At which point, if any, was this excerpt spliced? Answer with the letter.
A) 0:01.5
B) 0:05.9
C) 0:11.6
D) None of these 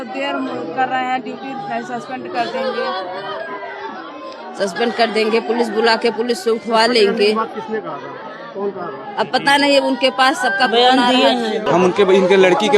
C